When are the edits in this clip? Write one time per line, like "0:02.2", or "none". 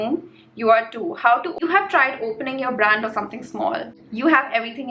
0:01.5
0:04.0